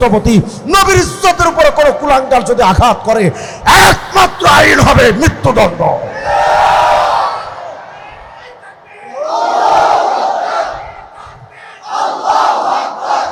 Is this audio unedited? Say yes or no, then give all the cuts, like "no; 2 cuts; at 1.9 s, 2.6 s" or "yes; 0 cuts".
yes; 0 cuts